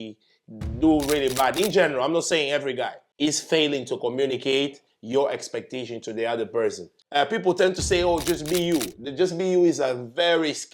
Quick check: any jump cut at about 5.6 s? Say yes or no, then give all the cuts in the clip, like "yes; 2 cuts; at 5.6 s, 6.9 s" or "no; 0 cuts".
no; 2 cuts; at 3.0 s, 6.9 s